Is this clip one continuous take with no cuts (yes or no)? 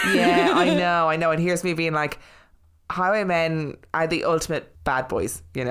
no